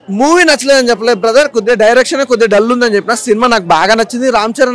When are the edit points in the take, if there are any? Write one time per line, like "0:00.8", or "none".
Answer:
none